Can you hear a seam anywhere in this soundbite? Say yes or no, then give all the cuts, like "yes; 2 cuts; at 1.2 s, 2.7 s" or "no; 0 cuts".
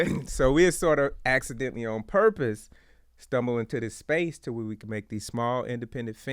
no; 0 cuts